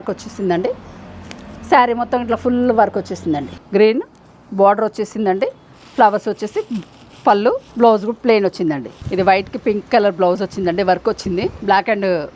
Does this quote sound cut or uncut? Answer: cut